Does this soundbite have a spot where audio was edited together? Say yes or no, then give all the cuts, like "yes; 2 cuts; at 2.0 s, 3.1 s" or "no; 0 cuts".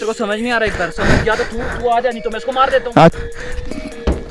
yes; 1 cut; at 3.1 s